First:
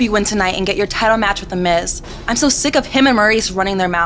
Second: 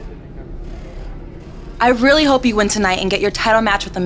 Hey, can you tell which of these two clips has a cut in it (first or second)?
second